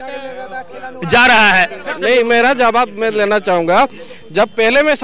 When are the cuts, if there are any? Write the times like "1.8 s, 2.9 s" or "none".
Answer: 1.9 s